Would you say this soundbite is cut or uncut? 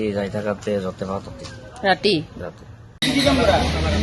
cut